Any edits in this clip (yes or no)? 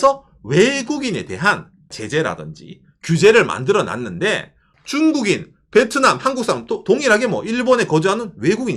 yes